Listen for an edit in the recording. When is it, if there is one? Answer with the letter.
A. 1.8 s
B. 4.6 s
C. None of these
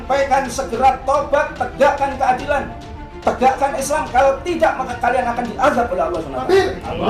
C